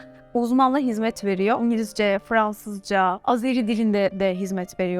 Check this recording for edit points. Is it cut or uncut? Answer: cut